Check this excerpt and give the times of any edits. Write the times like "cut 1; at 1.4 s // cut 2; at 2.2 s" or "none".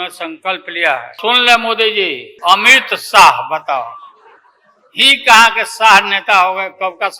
cut 1; at 1.2 s // cut 2; at 2.2 s